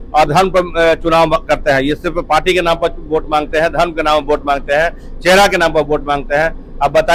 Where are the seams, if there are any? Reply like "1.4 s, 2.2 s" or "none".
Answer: none